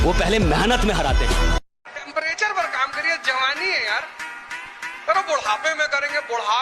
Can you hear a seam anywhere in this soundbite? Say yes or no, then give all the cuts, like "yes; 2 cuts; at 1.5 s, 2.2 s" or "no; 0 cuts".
yes; 1 cut; at 1.7 s